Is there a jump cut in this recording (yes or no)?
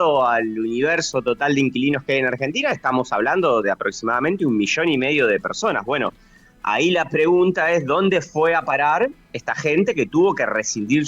no